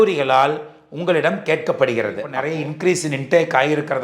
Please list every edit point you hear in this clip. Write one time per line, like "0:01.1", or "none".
0:02.3